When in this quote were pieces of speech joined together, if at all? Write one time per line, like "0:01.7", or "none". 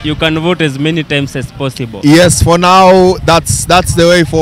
none